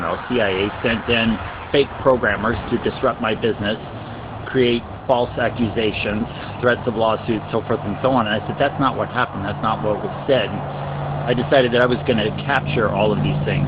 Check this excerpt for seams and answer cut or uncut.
uncut